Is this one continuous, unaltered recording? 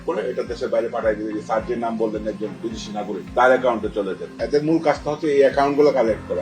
no; 1 cut; at 4.3 s

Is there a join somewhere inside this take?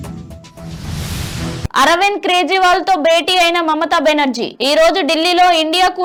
no; 0 cuts

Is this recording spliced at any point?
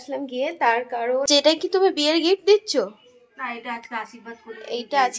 yes; 1 cut; at 1.4 s

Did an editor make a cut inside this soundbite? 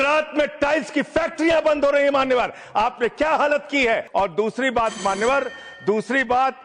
yes; 1 cut; at 4.1 s

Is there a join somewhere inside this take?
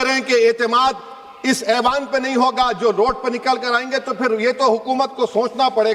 no; 0 cuts

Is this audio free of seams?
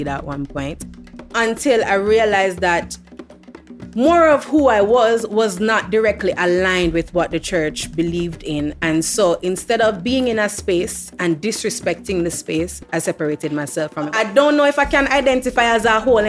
no; 1 cut; at 14.1 s

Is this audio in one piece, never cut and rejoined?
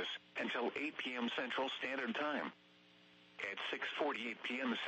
yes; 0 cuts

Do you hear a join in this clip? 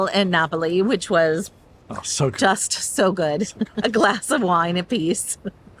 no; 0 cuts

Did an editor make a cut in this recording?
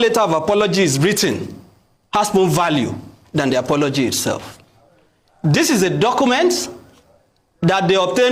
no; 0 cuts

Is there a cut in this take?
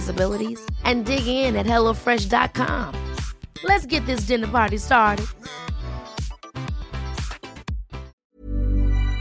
yes; 1 cut; at 8.1 s

